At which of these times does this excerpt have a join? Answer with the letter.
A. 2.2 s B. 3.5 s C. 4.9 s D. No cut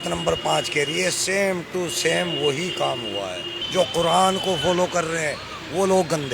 B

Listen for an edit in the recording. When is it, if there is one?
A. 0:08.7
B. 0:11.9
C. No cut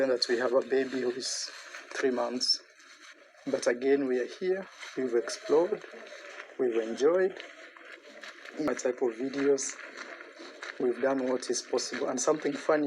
A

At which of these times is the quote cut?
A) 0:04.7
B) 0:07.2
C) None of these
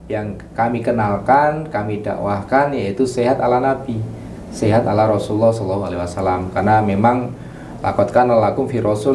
C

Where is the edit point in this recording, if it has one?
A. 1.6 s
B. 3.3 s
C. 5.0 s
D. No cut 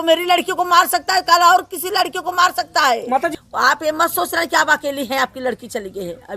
B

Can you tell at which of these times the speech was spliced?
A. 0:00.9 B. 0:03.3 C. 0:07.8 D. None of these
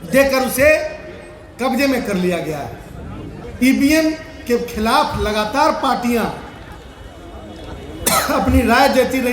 B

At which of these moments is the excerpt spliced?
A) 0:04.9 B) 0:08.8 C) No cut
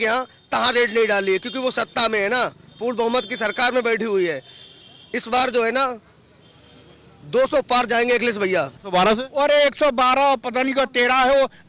B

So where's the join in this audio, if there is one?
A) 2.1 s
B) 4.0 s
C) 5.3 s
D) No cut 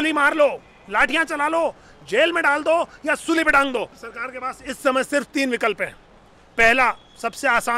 B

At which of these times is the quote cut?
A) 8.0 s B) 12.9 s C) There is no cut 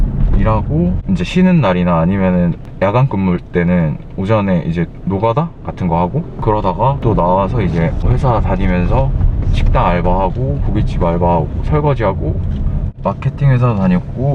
B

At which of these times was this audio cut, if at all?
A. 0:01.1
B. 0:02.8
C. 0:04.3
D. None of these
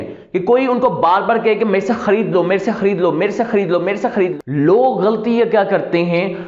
C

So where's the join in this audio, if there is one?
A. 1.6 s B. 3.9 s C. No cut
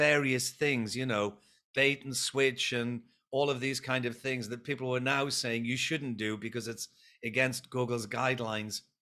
C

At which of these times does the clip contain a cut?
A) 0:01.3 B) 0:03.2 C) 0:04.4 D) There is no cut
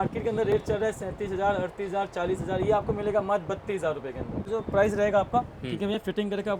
C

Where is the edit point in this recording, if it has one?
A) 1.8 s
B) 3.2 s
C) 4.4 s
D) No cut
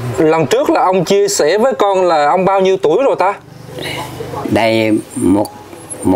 C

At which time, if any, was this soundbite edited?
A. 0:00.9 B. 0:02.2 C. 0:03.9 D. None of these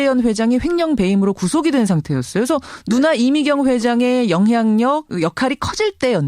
C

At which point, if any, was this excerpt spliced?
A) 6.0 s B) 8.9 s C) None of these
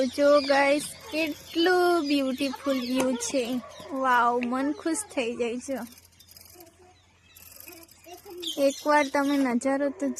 C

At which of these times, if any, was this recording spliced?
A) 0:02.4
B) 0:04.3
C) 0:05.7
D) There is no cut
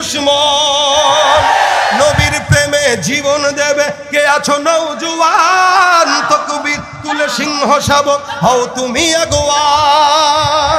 D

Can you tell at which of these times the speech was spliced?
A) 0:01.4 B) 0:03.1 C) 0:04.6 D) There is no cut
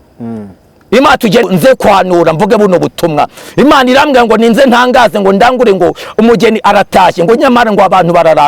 A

